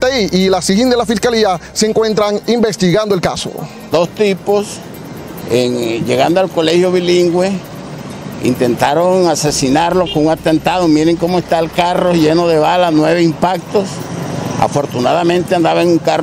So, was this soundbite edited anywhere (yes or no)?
yes